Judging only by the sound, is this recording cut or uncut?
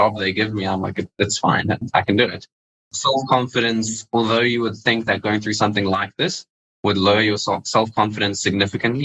cut